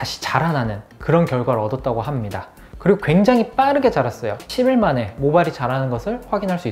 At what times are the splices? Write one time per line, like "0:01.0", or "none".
0:04.5